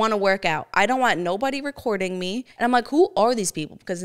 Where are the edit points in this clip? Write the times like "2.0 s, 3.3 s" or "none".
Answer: 2.5 s